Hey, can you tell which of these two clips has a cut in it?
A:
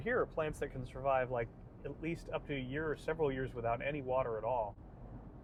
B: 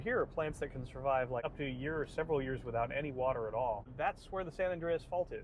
B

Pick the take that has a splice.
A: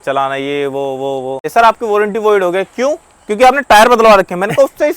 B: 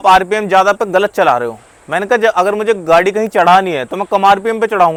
A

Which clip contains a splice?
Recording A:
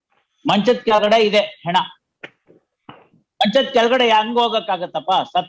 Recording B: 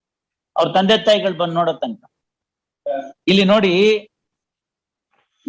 B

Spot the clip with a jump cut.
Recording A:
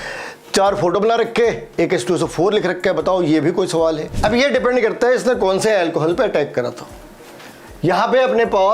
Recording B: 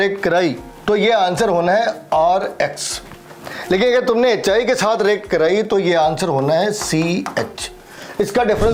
A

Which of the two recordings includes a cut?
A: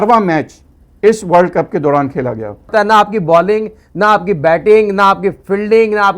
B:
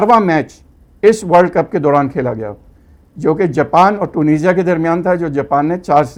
A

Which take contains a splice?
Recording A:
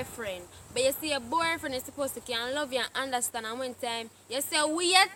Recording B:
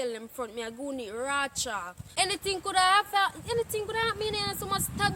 B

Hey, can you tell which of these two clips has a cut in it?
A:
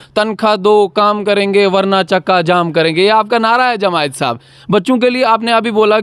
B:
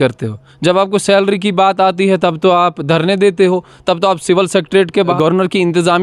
B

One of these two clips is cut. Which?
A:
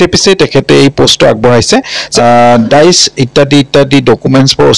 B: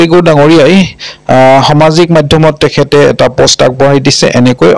A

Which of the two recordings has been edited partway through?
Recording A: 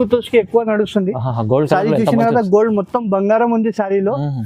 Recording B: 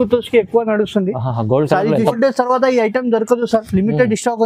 B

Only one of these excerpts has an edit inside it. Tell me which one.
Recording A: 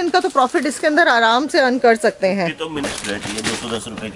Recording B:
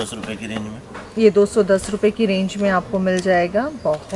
A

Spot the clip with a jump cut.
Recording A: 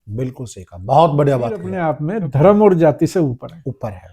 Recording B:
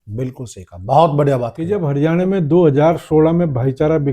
B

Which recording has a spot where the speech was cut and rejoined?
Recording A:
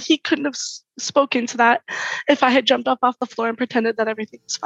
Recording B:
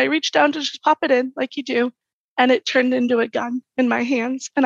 A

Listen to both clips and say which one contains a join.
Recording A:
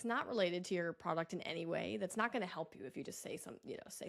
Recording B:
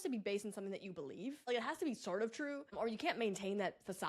B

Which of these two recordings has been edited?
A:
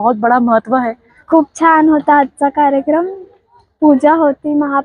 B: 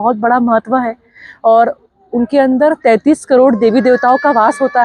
A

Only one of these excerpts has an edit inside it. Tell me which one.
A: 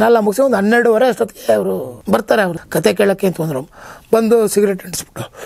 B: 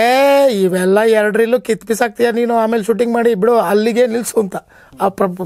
A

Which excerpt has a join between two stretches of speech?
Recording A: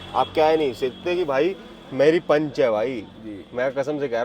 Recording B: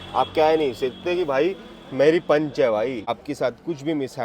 B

